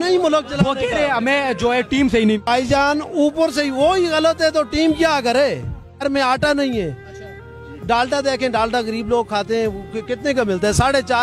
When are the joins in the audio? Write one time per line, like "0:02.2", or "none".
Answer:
0:02.5
0:06.0